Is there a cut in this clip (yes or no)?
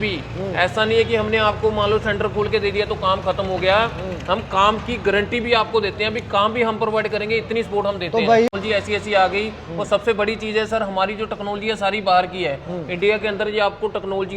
yes